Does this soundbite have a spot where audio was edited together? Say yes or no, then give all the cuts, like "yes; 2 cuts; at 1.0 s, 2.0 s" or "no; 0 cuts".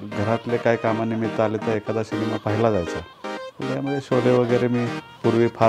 no; 0 cuts